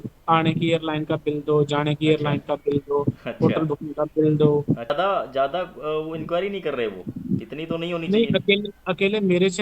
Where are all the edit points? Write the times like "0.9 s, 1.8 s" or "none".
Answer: 4.9 s